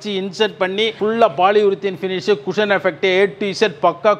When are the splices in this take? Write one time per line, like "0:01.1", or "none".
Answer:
none